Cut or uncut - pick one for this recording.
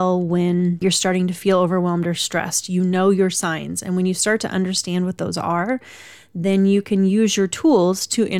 uncut